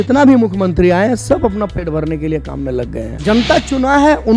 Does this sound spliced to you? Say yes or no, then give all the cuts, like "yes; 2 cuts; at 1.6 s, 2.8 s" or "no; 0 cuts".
yes; 1 cut; at 3.1 s